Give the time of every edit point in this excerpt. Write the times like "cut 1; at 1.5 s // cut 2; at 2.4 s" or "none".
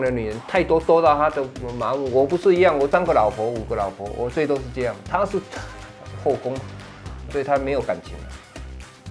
cut 1; at 8.1 s